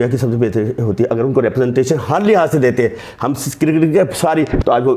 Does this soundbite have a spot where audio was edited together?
no; 0 cuts

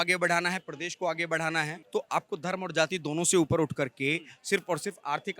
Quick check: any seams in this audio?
yes; 1 cut; at 1.8 s

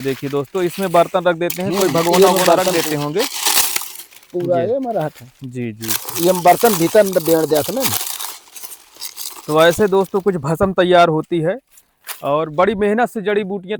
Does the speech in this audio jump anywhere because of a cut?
no; 0 cuts

